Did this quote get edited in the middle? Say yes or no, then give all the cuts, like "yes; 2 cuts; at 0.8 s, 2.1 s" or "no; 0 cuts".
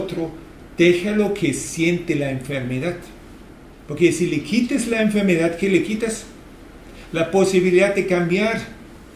no; 0 cuts